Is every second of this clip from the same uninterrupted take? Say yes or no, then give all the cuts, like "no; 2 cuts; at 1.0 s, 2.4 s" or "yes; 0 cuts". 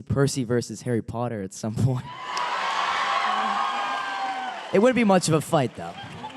yes; 0 cuts